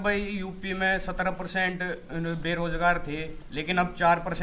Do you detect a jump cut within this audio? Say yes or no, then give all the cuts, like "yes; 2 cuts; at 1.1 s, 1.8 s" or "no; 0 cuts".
no; 0 cuts